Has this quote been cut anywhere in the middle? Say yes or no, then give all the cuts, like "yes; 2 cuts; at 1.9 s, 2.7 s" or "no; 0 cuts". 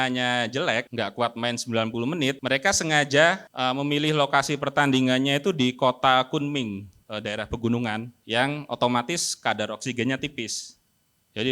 yes; 5 cuts; at 0.9 s, 2.4 s, 3.5 s, 6.9 s, 8.1 s